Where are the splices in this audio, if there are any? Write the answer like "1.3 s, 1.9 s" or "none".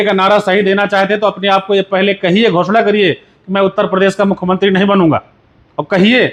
none

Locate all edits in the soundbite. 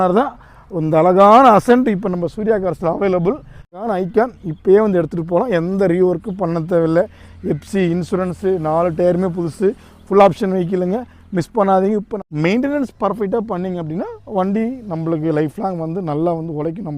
3.8 s, 12.1 s

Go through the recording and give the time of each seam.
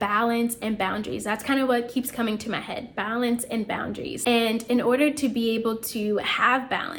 none

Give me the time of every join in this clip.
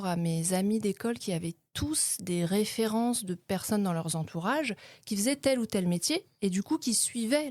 none

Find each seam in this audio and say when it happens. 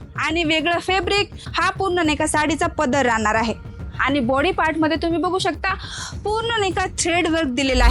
1.4 s

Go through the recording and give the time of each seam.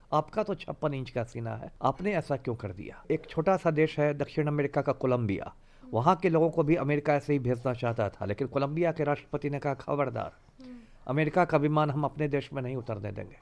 1.7 s, 3.0 s

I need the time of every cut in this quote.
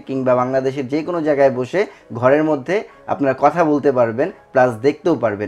none

